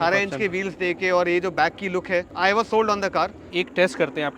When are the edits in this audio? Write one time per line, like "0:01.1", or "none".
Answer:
0:02.3
0:03.5